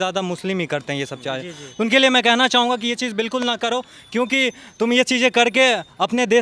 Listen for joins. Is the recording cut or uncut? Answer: uncut